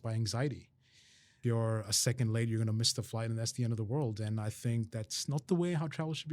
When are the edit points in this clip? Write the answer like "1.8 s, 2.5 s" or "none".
1.3 s